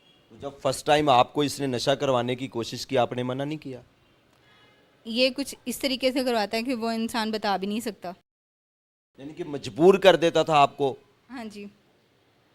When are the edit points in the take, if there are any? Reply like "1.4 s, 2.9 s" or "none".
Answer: none